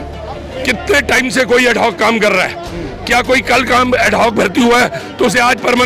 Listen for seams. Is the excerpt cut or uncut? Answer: uncut